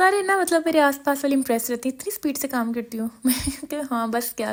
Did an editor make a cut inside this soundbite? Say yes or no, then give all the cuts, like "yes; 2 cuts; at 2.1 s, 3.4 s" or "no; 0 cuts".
no; 0 cuts